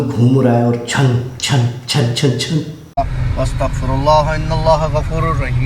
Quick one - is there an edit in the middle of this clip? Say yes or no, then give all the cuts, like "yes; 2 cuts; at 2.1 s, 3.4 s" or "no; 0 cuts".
yes; 1 cut; at 2.9 s